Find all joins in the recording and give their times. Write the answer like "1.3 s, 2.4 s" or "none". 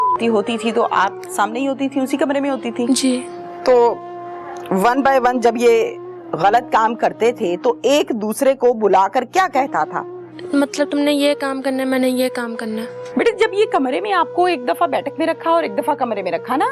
3.5 s, 10.4 s, 13.0 s